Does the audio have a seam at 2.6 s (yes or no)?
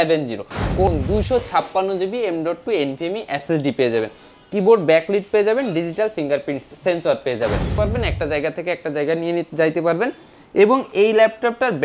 no